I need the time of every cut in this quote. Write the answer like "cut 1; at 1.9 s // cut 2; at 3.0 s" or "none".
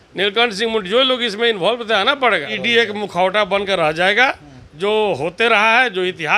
cut 1; at 2.6 s